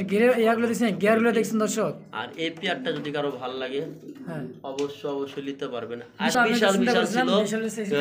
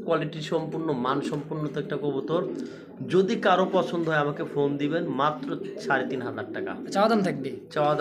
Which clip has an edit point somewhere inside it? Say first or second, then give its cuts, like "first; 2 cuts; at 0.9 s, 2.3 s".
first; 1 cut; at 6.3 s